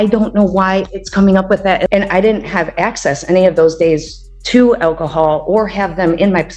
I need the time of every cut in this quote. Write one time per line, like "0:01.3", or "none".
0:01.9